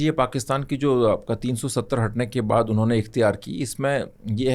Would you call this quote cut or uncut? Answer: uncut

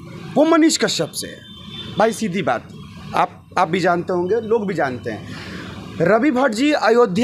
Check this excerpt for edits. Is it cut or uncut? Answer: uncut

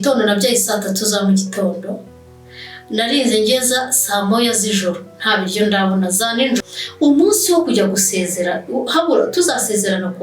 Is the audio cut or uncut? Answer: cut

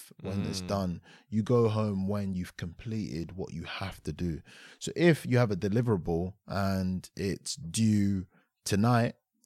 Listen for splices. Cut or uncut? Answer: uncut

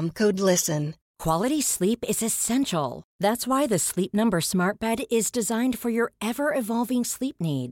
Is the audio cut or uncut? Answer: cut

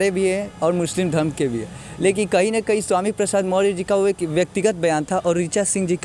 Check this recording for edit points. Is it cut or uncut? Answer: uncut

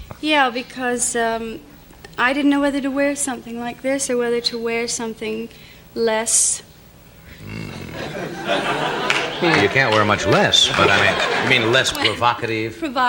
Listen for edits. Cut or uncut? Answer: uncut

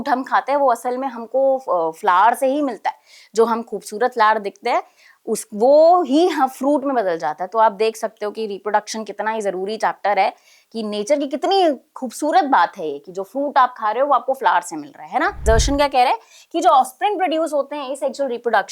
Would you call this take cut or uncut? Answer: cut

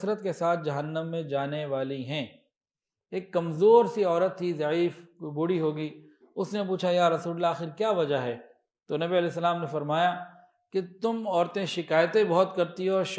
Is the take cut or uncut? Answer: uncut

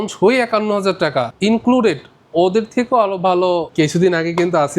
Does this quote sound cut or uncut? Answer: cut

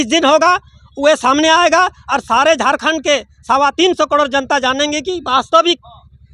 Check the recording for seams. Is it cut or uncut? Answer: uncut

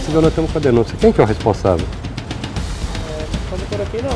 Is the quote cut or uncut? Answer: uncut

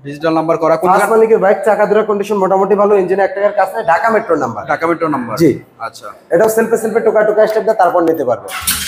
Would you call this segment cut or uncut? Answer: uncut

